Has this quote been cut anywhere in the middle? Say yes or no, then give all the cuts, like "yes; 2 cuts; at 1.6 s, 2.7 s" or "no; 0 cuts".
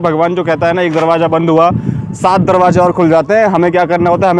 no; 0 cuts